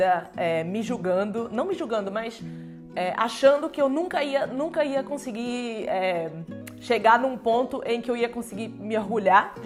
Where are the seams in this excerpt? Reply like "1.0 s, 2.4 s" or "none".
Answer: none